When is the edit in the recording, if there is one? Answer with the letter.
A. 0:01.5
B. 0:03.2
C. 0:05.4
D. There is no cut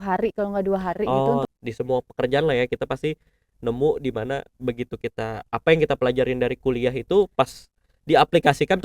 A